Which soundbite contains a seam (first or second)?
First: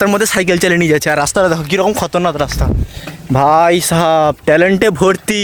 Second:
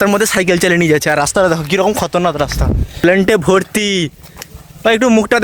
second